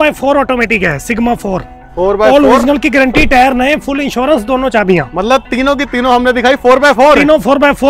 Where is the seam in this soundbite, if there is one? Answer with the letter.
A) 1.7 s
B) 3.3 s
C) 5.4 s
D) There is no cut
D